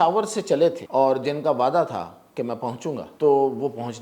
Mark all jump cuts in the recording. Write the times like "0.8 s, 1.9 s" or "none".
0.8 s, 3.1 s